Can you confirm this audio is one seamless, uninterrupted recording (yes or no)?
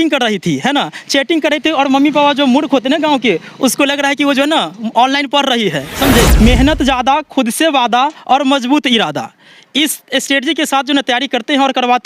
no